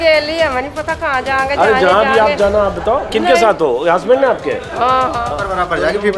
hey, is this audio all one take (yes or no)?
no